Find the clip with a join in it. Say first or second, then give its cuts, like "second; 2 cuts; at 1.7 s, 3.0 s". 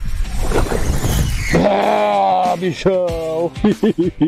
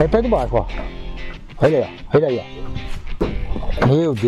second; 1 cut; at 3.2 s